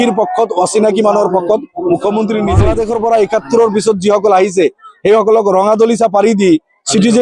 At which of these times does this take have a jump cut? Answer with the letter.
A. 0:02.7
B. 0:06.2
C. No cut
A